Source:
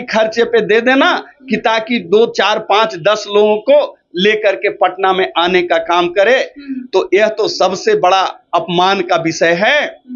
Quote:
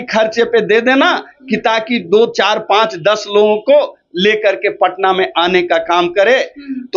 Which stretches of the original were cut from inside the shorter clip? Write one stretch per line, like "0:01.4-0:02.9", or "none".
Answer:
none